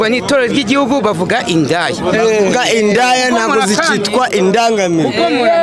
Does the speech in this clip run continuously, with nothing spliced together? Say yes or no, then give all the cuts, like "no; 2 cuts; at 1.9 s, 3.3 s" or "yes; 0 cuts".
yes; 0 cuts